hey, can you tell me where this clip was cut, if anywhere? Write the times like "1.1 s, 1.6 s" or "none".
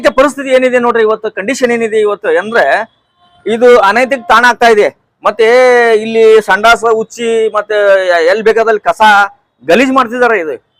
none